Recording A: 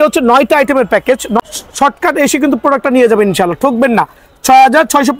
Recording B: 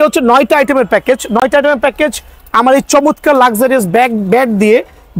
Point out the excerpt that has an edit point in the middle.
A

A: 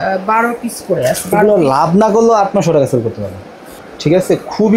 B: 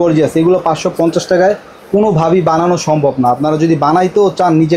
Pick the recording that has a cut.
A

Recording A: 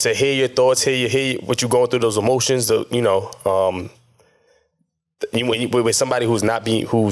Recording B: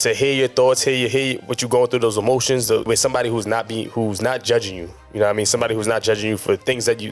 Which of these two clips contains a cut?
B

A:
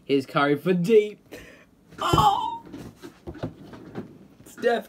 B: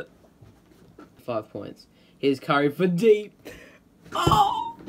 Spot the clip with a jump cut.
B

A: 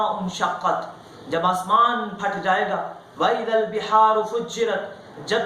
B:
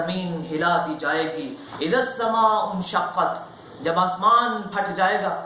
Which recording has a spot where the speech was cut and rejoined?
B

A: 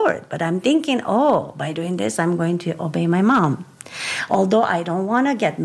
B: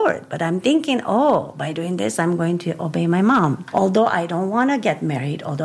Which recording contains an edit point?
B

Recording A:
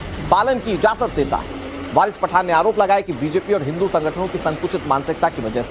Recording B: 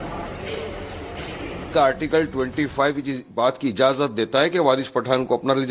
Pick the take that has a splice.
A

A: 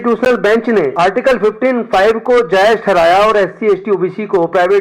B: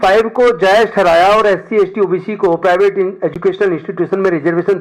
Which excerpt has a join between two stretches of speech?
A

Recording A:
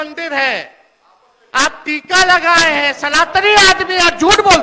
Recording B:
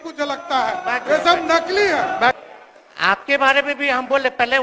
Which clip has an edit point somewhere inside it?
B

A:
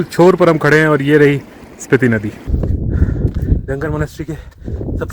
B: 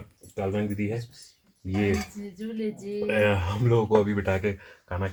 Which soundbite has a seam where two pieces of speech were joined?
A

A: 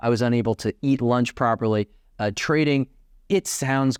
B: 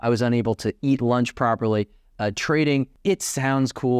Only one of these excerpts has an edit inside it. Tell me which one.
B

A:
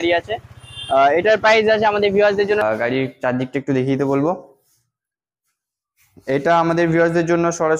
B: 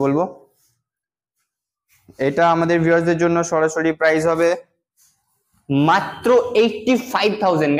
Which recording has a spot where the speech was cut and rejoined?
A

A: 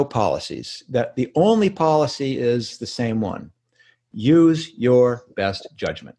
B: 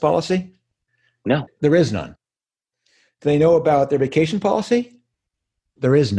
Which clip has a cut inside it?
B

